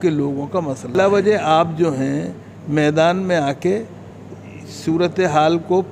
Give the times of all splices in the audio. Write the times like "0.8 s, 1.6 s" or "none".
0.9 s

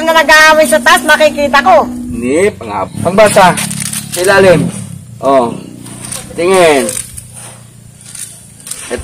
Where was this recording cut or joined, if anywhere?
2.1 s

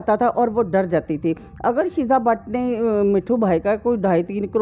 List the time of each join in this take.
none

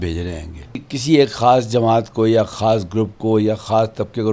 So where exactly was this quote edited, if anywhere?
0.9 s

